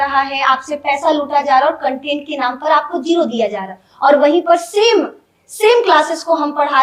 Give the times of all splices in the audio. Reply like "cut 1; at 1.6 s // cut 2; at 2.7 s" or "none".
none